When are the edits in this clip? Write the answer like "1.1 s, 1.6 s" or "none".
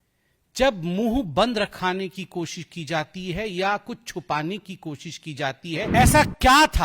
5.9 s